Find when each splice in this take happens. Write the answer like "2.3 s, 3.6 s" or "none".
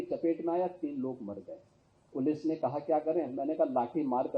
2.1 s